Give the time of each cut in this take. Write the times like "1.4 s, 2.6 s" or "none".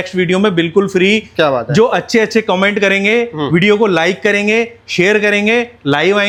none